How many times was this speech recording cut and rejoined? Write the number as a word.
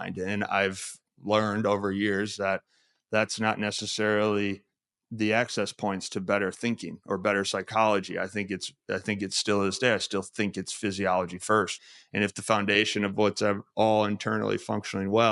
one